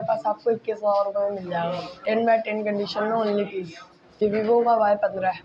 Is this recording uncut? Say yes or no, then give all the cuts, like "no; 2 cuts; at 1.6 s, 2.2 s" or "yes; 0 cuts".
no; 2 cuts; at 1.9 s, 4.2 s